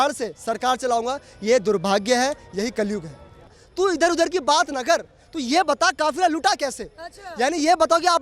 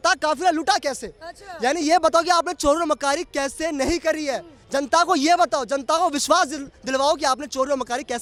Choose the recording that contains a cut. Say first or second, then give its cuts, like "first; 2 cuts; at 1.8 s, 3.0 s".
first; 1 cut; at 3.6 s